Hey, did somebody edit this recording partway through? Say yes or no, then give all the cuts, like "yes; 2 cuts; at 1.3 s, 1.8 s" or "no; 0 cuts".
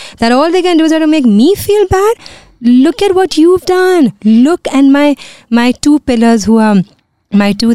no; 0 cuts